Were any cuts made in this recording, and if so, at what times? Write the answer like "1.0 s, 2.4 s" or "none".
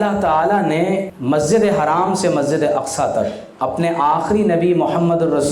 1.1 s, 3.4 s